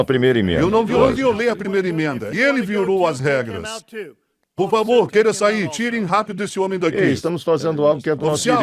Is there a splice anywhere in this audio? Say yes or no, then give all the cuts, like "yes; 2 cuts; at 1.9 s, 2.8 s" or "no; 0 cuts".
yes; 1 cut; at 0.9 s